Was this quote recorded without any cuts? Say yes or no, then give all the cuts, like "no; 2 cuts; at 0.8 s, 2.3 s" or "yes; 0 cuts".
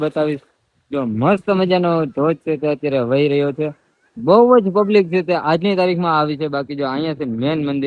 yes; 0 cuts